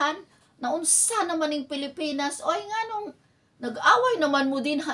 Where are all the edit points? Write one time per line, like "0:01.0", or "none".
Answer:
none